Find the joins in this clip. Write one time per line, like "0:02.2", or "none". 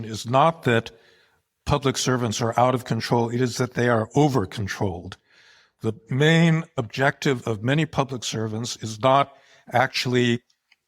0:06.7